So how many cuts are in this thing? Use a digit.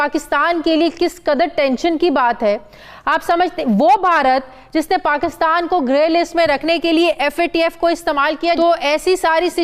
1